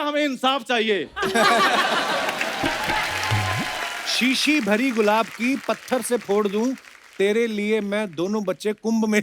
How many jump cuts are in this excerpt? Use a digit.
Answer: 1